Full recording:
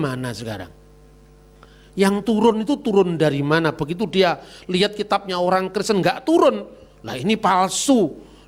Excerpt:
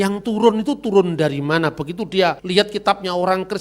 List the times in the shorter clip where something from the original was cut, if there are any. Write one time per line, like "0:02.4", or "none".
0:02.4